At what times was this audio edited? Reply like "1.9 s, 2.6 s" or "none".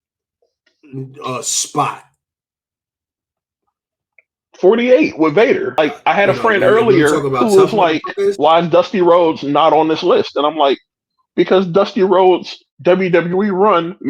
5.8 s